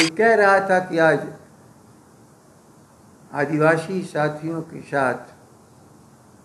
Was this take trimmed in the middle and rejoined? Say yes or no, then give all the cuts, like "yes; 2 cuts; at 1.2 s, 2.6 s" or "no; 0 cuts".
no; 0 cuts